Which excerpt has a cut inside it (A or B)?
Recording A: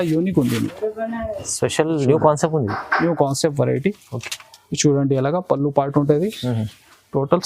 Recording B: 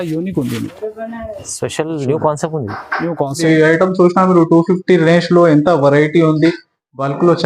B